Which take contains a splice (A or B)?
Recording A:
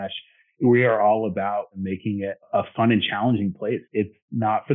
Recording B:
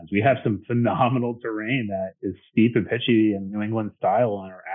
A